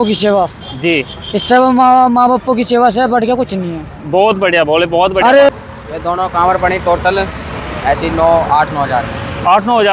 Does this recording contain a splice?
yes; 1 cut; at 5.5 s

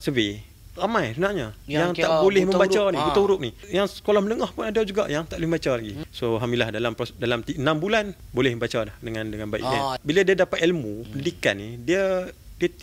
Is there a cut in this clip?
yes; 4 cuts; at 3.6 s, 6.0 s, 8.2 s, 10.0 s

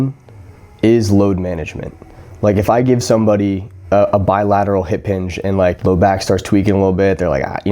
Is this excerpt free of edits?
no; 2 cuts; at 3.7 s, 5.8 s

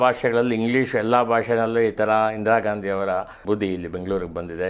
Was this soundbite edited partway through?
yes; 1 cut; at 3.4 s

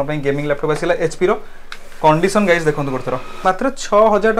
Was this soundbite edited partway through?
yes; 1 cut; at 3.3 s

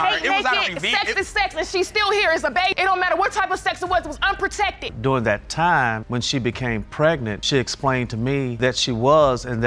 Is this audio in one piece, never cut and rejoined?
no; 1 cut; at 4.8 s

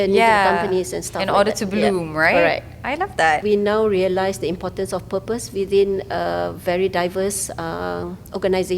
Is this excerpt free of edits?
no; 1 cut; at 3.4 s

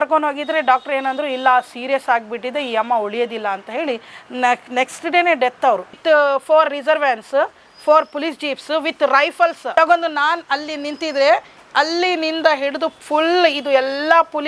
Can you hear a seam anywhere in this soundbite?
yes; 2 cuts; at 5.9 s, 9.6 s

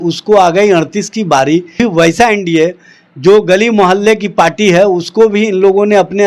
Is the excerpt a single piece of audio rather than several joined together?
no; 1 cut; at 1.8 s

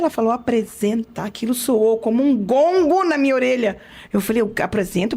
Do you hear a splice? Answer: no; 0 cuts

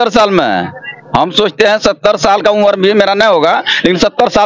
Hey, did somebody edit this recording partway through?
no; 0 cuts

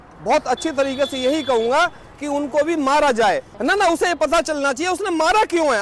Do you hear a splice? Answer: no; 0 cuts

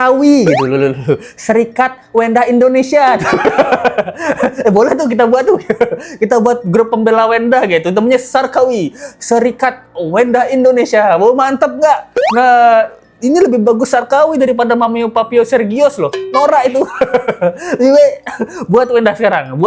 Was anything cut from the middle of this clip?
no; 0 cuts

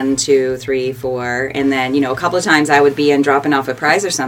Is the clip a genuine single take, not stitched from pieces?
yes; 0 cuts

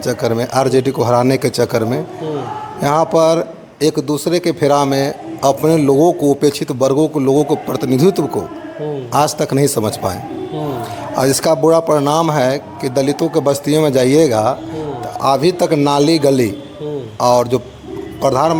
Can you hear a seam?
no; 0 cuts

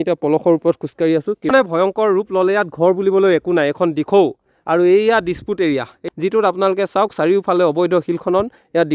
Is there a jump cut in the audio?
yes; 2 cuts; at 1.5 s, 6.0 s

